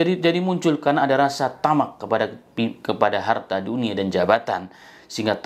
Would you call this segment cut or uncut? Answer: uncut